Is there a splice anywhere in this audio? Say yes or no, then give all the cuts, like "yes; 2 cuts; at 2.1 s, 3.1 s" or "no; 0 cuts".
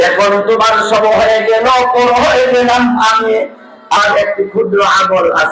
yes; 1 cut; at 4.0 s